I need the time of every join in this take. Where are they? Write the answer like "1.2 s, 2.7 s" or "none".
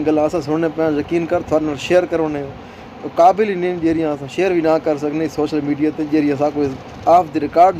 none